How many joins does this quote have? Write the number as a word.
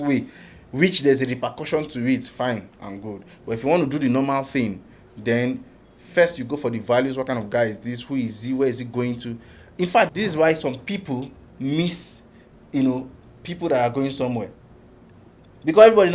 one